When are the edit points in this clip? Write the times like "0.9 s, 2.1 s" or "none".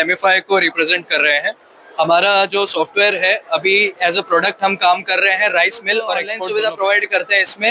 6.3 s